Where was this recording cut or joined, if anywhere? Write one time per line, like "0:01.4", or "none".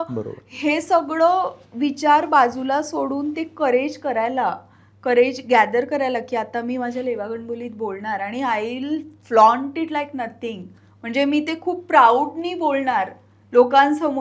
none